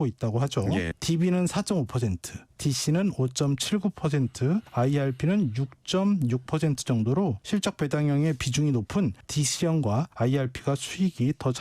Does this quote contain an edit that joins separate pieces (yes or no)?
yes